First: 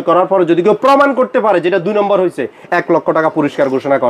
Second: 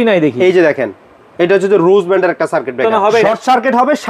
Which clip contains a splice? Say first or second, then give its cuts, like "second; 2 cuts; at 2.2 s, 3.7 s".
second; 1 cut; at 3.0 s